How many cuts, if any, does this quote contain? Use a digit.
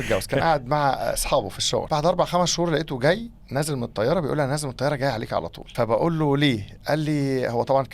2